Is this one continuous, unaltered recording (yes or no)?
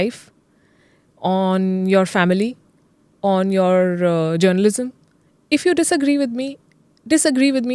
yes